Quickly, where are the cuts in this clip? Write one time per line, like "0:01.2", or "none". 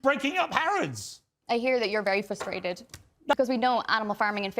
0:03.3